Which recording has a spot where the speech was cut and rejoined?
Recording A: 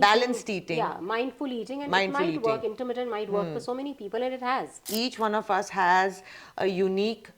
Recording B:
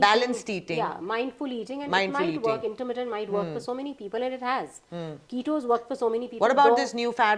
A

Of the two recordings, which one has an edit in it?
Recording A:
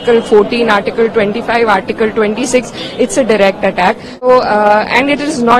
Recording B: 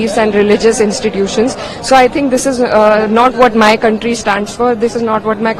A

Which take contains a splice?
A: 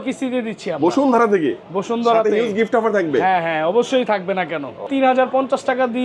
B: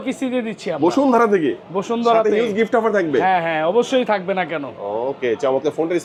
A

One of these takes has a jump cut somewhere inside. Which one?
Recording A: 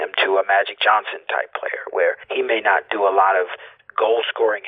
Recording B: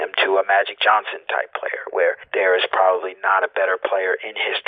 B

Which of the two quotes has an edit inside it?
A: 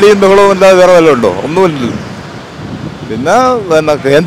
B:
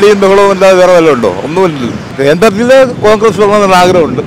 B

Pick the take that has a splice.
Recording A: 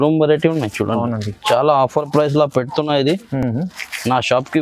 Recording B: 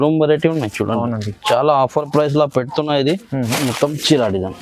B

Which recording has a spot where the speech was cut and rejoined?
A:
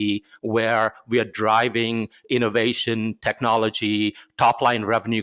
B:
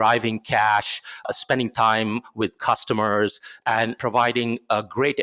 B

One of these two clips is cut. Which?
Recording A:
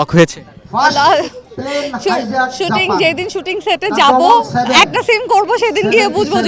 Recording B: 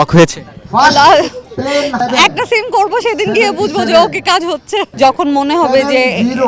B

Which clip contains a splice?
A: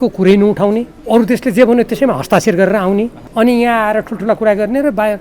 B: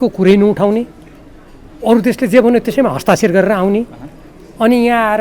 A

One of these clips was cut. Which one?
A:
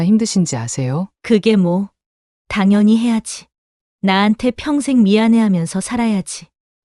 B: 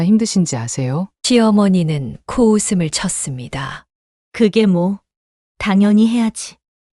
A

